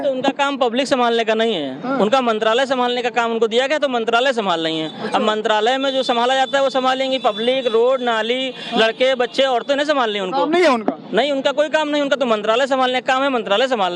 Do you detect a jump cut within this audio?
no; 0 cuts

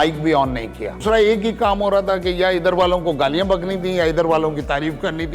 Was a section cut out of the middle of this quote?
yes; 1 cut; at 1.0 s

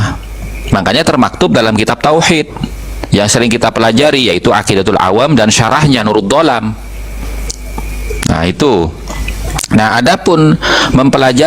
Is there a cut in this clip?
no; 0 cuts

